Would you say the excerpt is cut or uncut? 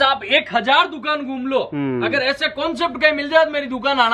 uncut